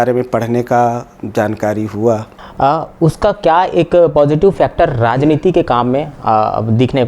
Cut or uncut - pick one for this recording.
cut